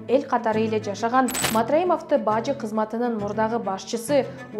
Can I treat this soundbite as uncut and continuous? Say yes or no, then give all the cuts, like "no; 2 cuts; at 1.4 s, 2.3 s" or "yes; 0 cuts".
no; 1 cut; at 1.4 s